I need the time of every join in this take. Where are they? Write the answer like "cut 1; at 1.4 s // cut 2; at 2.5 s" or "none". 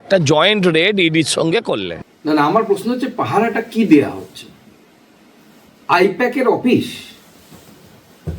cut 1; at 2.0 s